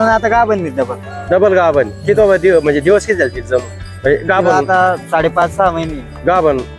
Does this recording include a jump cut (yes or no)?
no